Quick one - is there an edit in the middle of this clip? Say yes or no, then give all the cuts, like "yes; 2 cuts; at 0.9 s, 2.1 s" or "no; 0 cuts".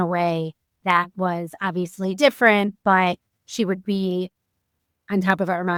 no; 0 cuts